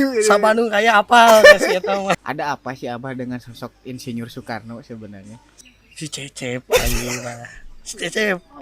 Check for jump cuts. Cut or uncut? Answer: cut